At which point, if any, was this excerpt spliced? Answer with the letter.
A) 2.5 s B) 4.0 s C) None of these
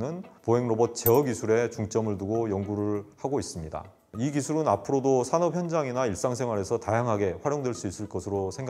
B